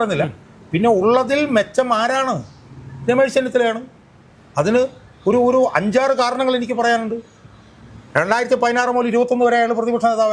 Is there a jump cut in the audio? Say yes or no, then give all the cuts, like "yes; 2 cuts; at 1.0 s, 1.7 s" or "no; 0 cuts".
no; 0 cuts